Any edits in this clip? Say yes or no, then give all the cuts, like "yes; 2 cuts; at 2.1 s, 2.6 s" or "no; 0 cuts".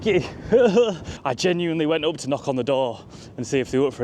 yes; 1 cut; at 1.1 s